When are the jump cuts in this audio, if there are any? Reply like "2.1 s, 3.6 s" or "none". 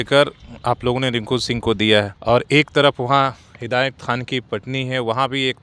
2.1 s